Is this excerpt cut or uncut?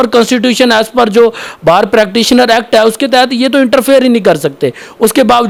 uncut